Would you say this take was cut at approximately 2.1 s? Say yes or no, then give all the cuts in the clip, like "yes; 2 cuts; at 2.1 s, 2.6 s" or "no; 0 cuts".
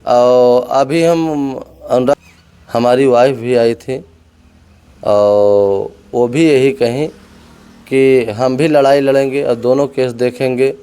yes; 1 cut; at 2.1 s